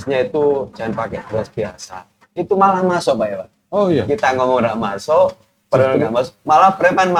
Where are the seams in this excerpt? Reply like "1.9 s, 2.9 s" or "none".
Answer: none